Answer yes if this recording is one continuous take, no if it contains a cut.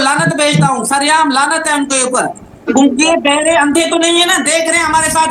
no